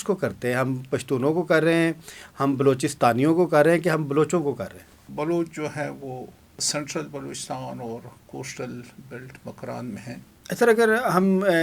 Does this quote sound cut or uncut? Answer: cut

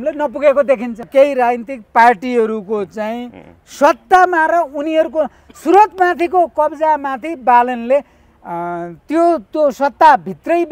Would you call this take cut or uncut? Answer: cut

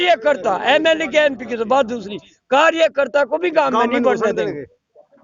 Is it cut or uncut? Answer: uncut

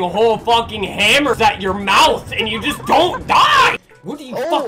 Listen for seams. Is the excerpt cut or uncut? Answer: uncut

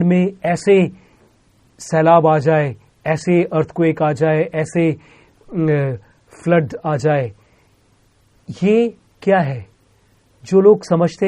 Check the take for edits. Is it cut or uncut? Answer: uncut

